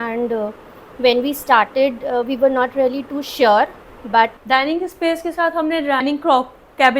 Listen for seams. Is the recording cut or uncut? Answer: cut